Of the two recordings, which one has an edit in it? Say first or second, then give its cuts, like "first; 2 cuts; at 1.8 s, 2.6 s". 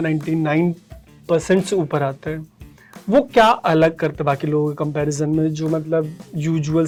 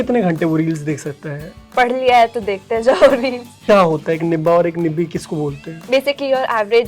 second; 2 cuts; at 3.5 s, 5.7 s